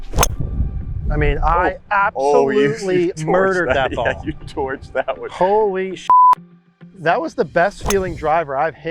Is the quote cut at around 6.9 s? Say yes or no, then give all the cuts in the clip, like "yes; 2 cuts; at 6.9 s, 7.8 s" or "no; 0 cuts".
yes; 1 cut; at 6.9 s